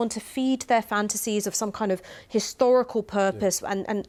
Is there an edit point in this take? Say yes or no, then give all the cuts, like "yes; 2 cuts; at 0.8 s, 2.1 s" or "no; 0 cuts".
no; 0 cuts